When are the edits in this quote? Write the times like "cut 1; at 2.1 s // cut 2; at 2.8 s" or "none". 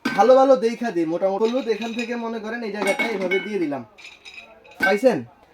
cut 1; at 1.4 s

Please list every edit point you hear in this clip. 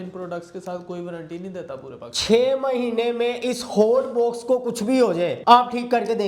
cut 1; at 5.4 s

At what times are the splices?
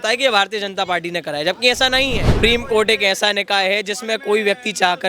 cut 1; at 2.4 s

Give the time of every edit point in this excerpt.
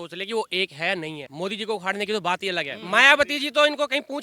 cut 1; at 1.2 s // cut 2; at 2.7 s

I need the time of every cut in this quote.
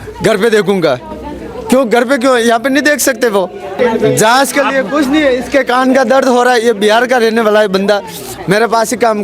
none

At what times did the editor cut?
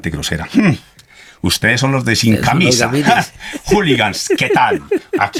none

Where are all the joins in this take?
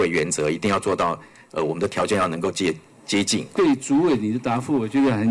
cut 1; at 3.5 s

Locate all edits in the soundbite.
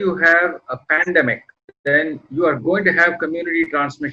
none

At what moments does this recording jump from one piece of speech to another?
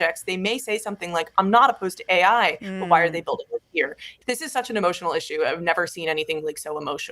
cut 1; at 4.1 s

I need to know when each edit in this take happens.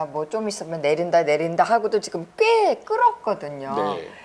none

